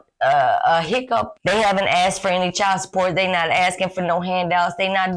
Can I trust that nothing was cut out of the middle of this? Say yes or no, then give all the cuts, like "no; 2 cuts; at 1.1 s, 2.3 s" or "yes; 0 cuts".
no; 1 cut; at 1.3 s